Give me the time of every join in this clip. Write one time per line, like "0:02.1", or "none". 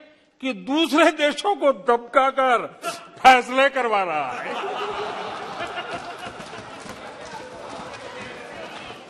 none